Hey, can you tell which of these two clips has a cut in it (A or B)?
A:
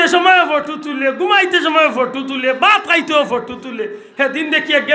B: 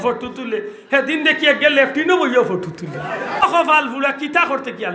B